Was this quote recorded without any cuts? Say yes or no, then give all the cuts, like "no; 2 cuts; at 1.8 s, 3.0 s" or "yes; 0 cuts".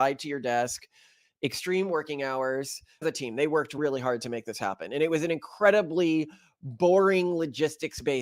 yes; 0 cuts